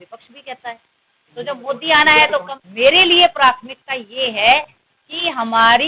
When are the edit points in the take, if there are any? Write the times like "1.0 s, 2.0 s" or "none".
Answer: 2.6 s